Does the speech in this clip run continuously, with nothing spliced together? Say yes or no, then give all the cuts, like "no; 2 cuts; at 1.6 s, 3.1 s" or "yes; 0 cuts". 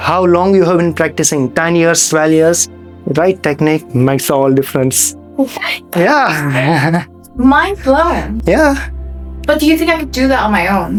yes; 0 cuts